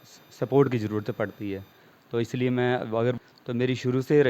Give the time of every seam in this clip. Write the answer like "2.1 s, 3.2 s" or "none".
3.2 s